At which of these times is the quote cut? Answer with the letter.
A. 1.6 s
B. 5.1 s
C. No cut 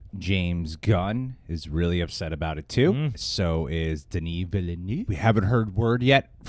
B